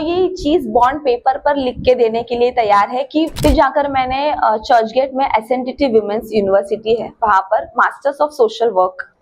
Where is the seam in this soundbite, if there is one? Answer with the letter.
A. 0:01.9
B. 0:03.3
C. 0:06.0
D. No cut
B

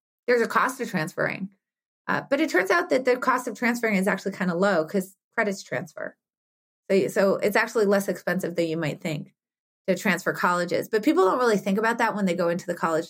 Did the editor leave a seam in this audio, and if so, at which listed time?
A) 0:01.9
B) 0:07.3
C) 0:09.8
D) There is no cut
D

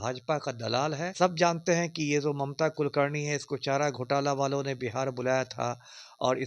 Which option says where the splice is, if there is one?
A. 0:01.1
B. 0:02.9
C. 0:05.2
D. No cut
A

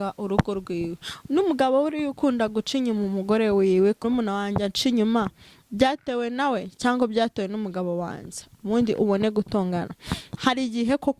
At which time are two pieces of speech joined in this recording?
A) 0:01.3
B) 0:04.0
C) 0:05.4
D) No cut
B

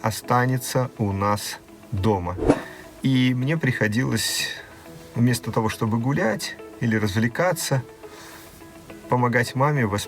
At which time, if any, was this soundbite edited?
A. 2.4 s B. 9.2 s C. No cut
A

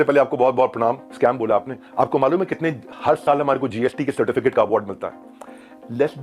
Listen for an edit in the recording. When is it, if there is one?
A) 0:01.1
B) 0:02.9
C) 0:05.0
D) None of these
A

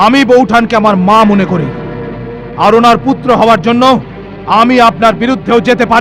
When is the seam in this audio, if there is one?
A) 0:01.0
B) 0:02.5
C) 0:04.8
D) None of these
D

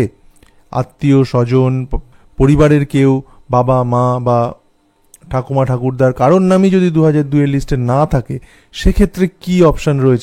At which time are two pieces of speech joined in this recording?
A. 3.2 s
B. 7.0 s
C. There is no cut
C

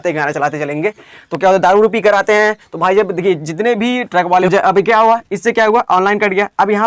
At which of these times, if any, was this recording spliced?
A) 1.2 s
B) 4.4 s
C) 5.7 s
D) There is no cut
B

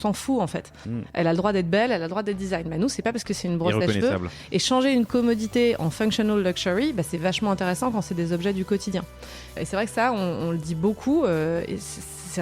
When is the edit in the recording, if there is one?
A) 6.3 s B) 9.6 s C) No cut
B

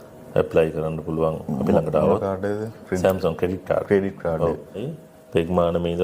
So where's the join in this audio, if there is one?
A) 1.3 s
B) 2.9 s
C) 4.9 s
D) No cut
C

